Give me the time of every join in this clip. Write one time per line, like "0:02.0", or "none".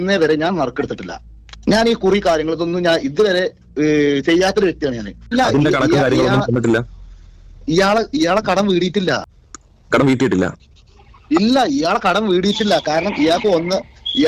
0:05.3

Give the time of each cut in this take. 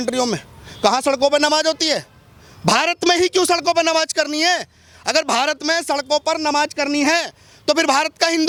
none

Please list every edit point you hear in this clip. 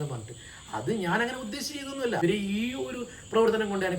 0:02.2

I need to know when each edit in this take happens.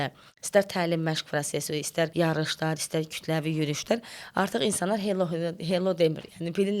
0:02.1

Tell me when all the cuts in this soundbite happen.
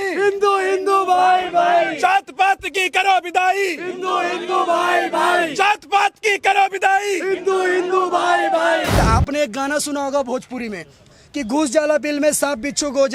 0:08.9

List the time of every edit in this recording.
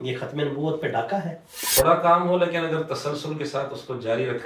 0:01.7

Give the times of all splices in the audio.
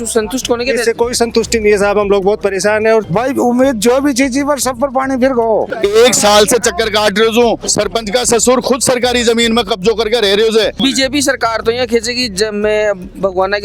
0:03.1
0:05.7
0:07.7
0:10.7

